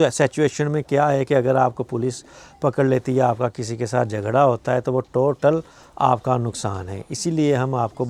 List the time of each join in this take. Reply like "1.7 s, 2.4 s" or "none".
none